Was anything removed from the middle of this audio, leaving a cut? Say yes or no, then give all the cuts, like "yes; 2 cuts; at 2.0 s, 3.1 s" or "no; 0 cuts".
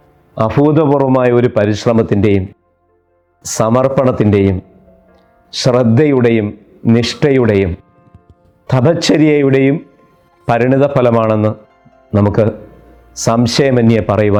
no; 0 cuts